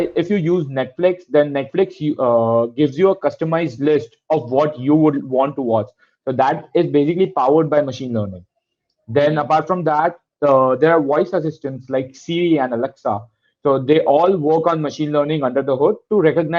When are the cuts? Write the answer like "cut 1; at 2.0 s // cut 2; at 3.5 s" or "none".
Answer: none